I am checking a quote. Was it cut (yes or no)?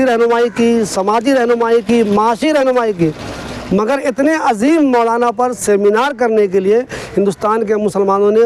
no